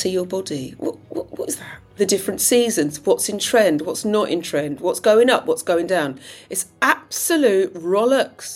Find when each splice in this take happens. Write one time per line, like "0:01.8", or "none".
0:01.9